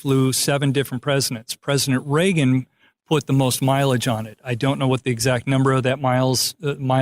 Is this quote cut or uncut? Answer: uncut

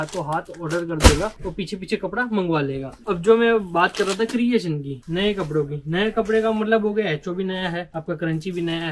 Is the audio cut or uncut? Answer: uncut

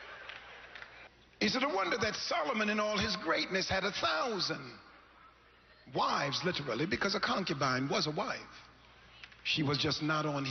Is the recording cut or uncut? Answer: cut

